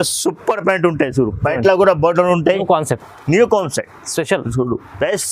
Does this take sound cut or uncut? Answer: cut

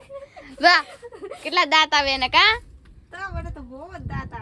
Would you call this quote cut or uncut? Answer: uncut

